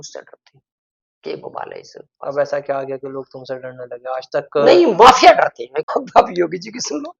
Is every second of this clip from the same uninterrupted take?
no; 1 cut; at 5.9 s

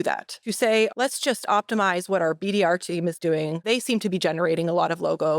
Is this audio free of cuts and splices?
no; 2 cuts; at 0.9 s, 3.6 s

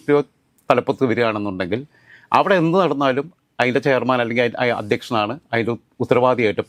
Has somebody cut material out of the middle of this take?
no; 0 cuts

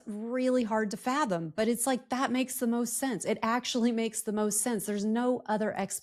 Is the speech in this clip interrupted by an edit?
no; 0 cuts

